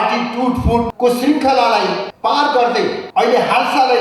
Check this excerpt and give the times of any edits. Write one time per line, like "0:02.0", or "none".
0:00.9
0:02.1
0:03.0